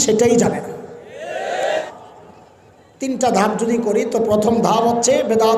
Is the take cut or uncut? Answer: cut